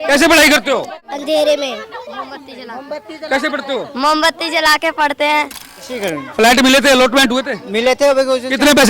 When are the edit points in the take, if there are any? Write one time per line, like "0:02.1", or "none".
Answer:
0:06.2